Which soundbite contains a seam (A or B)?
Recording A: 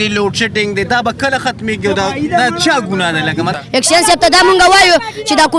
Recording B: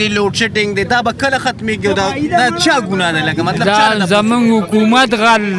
A